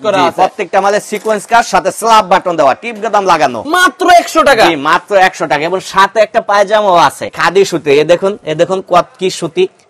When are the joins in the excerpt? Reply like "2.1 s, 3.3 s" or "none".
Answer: 3.6 s, 7.2 s